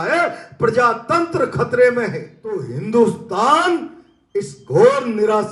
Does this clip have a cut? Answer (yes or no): yes